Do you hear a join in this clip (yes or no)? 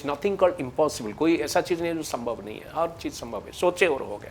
no